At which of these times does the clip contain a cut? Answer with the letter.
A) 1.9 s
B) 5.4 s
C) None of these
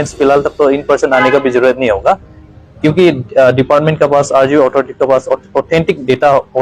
C